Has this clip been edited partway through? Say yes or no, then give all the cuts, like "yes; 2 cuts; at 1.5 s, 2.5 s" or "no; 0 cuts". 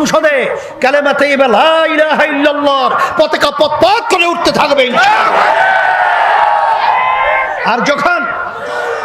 no; 0 cuts